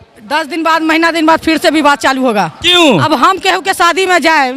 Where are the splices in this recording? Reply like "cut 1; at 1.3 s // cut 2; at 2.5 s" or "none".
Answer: cut 1; at 3.0 s